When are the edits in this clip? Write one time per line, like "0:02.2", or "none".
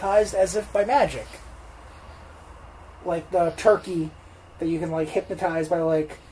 none